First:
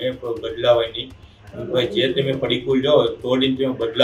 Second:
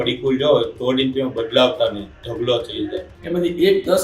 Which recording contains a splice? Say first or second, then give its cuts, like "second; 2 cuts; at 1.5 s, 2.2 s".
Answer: second; 1 cut; at 3.1 s